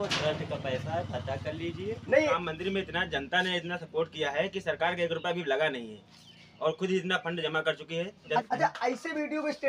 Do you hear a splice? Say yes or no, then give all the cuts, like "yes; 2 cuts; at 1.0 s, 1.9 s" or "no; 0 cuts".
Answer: yes; 2 cuts; at 2.4 s, 8.4 s